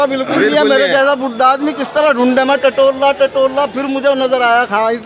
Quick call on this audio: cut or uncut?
uncut